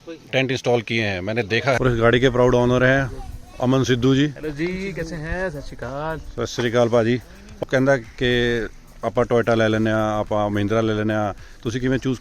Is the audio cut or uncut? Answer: cut